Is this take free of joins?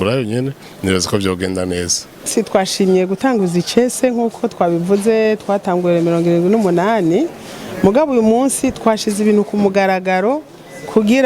no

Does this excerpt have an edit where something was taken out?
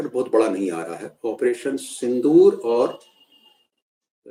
no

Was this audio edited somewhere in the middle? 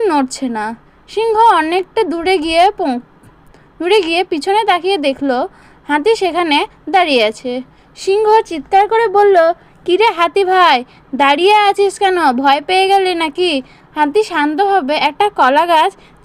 no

